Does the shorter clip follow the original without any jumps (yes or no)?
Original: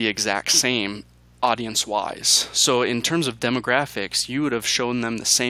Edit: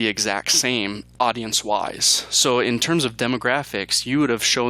no